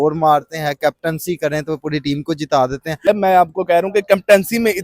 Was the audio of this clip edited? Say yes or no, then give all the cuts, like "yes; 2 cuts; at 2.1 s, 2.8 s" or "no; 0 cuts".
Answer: yes; 1 cut; at 3.1 s